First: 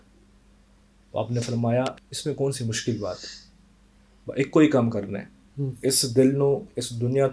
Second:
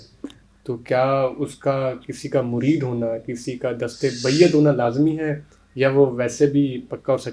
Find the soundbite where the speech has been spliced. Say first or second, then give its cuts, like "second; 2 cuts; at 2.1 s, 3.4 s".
first; 1 cut; at 2.1 s